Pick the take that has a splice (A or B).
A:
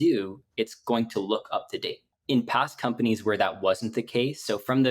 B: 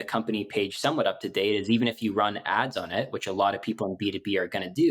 A